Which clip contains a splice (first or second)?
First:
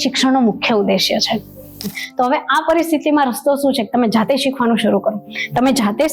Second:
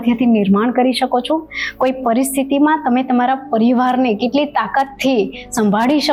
first